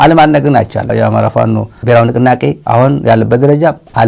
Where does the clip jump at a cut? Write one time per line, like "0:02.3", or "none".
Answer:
0:00.9